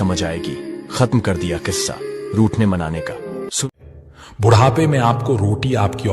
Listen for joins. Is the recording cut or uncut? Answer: cut